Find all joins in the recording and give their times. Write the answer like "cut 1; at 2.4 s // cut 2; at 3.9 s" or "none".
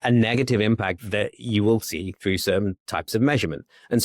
cut 1; at 1.0 s